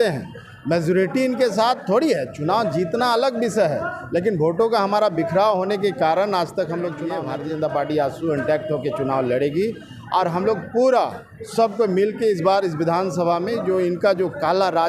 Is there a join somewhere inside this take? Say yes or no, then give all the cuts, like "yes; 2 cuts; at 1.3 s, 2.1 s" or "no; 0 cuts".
yes; 1 cut; at 7.1 s